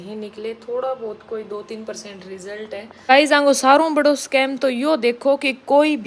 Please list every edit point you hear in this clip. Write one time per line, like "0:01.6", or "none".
0:02.9